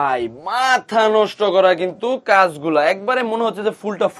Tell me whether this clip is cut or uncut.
uncut